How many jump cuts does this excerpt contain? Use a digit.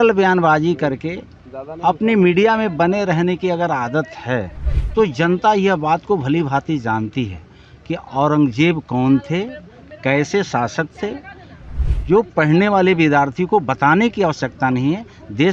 0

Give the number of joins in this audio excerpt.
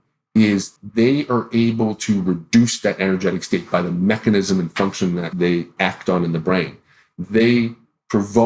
1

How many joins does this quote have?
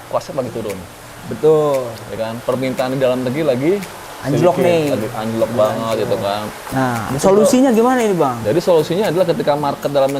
1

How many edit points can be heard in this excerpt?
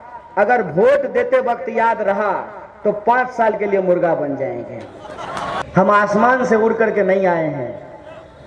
1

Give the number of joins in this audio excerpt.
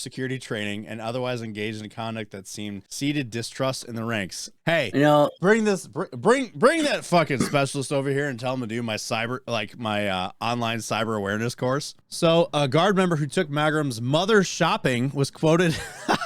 3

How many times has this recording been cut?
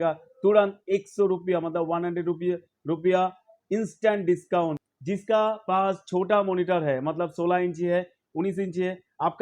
1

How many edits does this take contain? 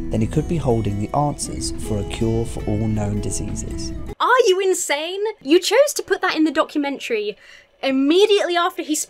2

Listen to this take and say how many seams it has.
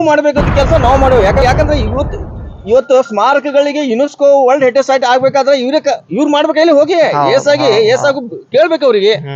1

